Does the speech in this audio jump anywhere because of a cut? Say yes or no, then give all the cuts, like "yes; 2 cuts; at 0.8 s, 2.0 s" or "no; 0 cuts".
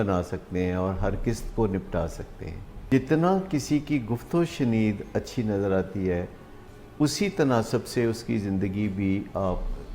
yes; 1 cut; at 2.7 s